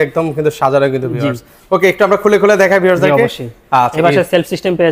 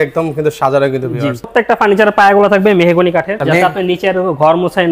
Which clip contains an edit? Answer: second; 2 cuts; at 1.5 s, 3.4 s

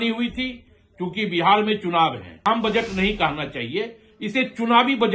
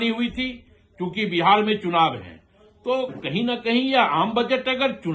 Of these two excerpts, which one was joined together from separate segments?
first; 1 cut; at 2.4 s

